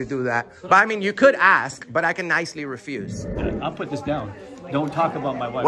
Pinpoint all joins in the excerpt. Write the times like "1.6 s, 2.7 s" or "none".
3.4 s